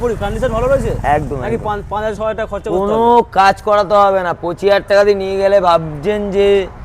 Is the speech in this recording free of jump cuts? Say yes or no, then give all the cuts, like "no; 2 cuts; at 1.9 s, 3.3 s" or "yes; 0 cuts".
yes; 0 cuts